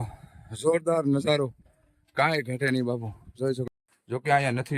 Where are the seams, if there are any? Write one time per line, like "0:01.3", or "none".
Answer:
0:03.8